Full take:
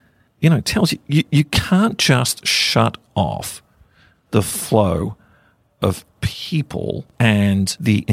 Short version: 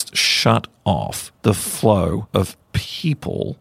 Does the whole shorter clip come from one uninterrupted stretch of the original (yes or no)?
no